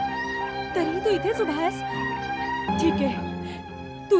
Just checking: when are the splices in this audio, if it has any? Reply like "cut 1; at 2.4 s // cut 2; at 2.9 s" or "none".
cut 1; at 2.7 s